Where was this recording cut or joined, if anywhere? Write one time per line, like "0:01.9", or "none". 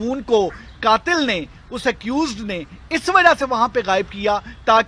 none